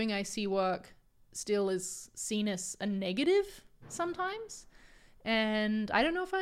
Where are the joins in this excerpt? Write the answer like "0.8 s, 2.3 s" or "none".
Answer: none